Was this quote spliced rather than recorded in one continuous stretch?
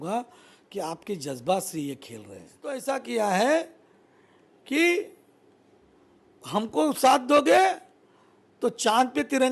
yes; 1 cut; at 2.8 s

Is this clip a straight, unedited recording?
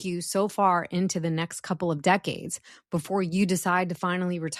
yes; 0 cuts

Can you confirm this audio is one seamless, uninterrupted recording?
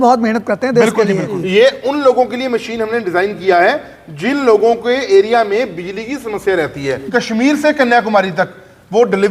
no; 2 cuts; at 1.4 s, 7.0 s

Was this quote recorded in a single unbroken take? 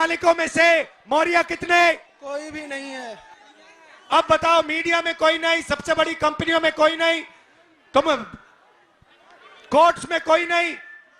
no; 1 cut; at 3.3 s

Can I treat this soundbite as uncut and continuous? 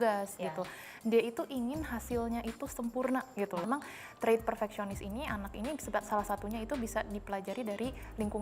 no; 1 cut; at 3.7 s

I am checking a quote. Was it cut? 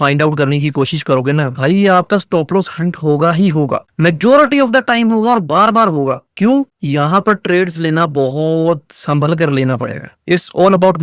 no; 0 cuts

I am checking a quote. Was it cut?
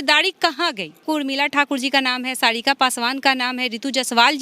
yes; 1 cut; at 1.0 s

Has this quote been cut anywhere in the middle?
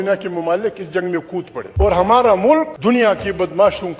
yes; 2 cuts; at 1.6 s, 2.7 s

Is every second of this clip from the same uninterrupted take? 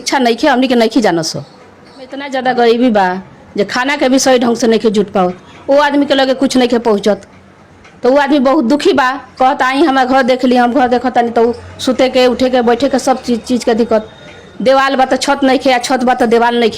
no; 1 cut; at 2.3 s

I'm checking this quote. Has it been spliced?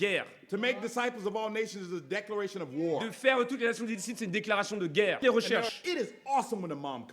yes; 1 cut; at 5.2 s

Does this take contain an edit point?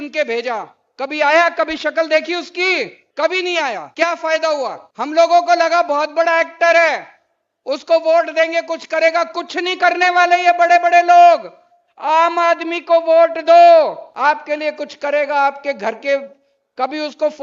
yes; 4 cuts; at 3.0 s, 3.9 s, 4.8 s, 14.1 s

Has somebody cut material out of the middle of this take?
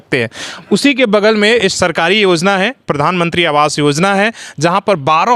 no; 0 cuts

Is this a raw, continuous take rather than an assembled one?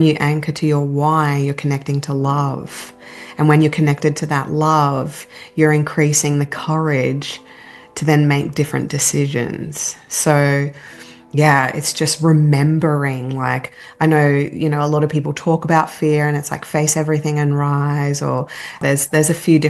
no; 1 cut; at 18.8 s

